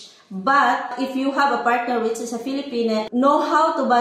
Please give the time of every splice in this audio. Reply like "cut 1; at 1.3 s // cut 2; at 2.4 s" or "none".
cut 1; at 0.9 s // cut 2; at 3.1 s